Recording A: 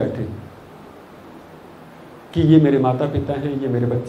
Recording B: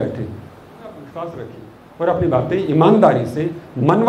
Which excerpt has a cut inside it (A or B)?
B